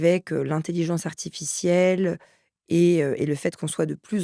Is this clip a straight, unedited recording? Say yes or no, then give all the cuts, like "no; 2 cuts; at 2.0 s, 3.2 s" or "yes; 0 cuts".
yes; 0 cuts